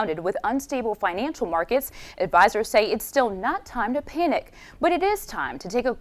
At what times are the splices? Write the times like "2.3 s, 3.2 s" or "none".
none